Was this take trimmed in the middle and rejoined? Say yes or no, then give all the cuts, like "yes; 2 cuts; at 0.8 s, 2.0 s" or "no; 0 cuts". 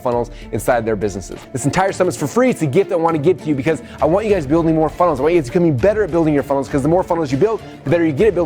yes; 1 cut; at 1.5 s